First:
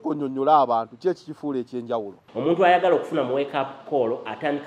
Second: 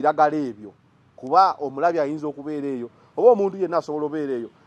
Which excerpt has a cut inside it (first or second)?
first